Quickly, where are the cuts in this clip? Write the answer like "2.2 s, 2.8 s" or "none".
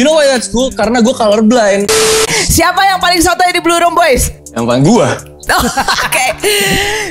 2.2 s, 4.4 s